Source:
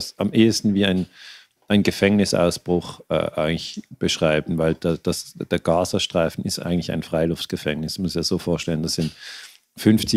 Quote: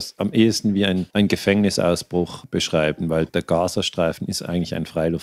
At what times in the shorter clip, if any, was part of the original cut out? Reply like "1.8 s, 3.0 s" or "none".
1.1 s, 2.4 s, 3.3 s